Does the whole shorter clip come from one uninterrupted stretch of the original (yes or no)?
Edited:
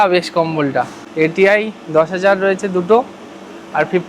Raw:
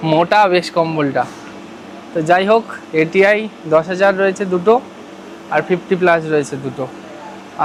no